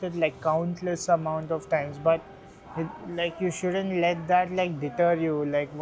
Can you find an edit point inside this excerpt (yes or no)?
no